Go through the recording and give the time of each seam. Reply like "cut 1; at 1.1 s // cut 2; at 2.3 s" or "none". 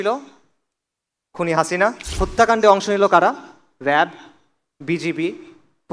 cut 1; at 2.1 s